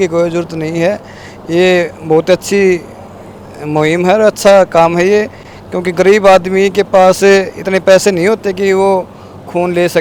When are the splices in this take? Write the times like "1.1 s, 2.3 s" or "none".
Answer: none